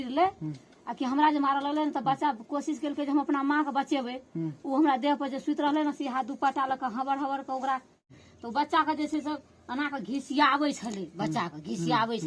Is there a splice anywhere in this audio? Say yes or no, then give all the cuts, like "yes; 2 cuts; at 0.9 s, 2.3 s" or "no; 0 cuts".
yes; 1 cut; at 8.1 s